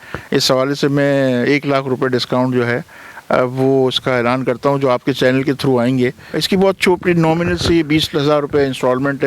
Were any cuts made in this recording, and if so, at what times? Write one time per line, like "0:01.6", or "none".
0:06.3